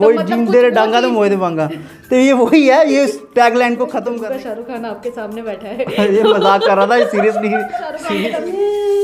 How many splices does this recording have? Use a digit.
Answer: 2